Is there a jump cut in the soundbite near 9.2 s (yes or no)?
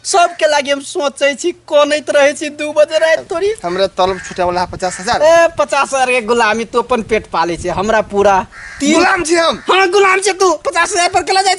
no